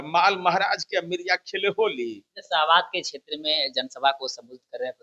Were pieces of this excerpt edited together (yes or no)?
no